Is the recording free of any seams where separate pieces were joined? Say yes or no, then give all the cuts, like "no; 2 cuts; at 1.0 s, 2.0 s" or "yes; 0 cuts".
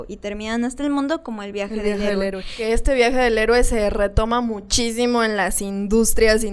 no; 1 cut; at 2.6 s